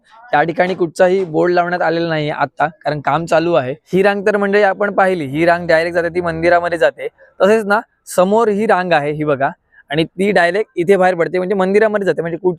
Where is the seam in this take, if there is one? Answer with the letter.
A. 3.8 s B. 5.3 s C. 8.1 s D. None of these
A